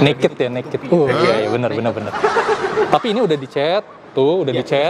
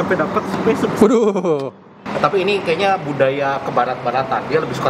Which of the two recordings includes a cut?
second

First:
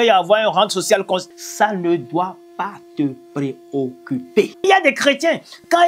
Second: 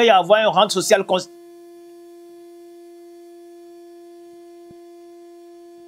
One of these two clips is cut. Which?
first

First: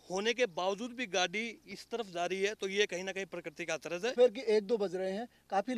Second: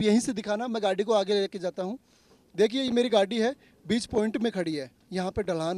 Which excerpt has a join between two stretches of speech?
first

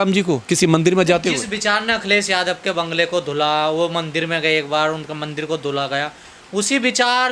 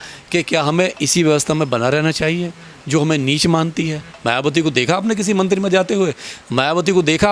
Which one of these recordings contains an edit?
second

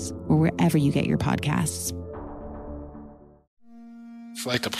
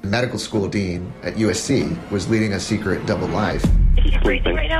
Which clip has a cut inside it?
first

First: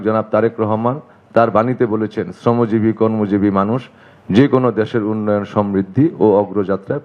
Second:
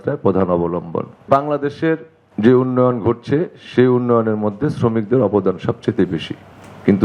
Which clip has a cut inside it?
second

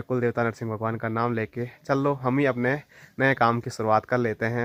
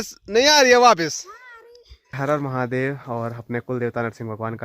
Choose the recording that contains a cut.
second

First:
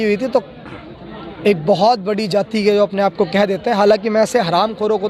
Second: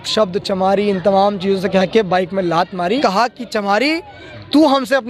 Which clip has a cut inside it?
second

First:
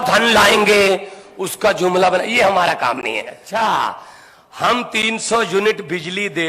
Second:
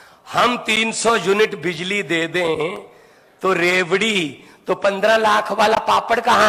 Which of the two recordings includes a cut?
first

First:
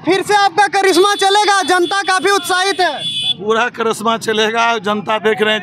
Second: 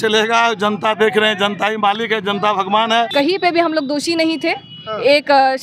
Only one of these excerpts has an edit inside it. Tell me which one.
second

